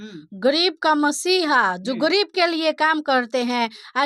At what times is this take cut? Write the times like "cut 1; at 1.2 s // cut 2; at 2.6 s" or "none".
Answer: none